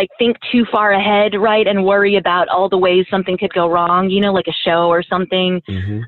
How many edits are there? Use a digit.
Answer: 0